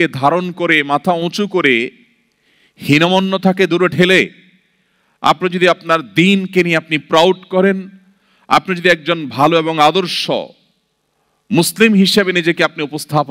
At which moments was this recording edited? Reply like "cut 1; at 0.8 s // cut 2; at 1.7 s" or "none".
none